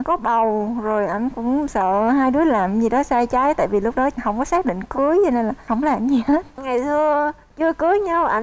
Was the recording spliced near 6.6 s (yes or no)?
yes